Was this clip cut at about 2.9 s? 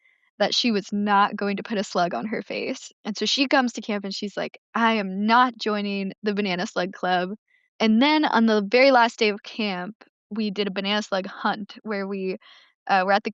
yes; 1 cut; at 2.9 s

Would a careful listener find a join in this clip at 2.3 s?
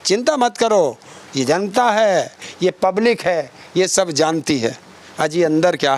no; 0 cuts

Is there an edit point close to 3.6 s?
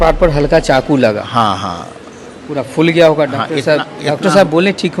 no; 0 cuts

